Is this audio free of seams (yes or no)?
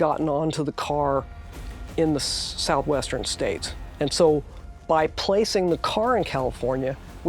no